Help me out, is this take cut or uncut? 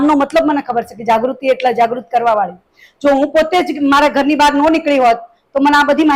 uncut